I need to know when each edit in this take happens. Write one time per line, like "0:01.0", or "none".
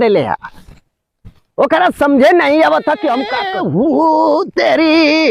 0:03.3